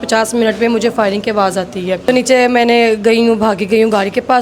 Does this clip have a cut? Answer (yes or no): yes